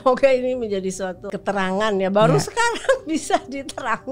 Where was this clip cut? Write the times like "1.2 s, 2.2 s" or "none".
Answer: 1.2 s